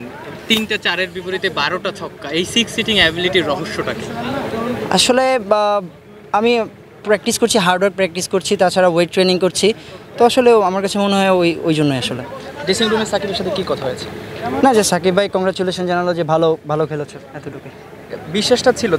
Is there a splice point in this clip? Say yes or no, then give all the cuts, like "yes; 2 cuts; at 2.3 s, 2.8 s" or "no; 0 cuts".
no; 0 cuts